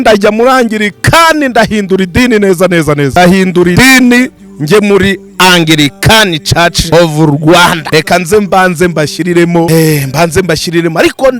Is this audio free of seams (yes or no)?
no